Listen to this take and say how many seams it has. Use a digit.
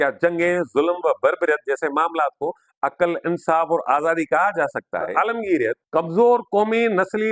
2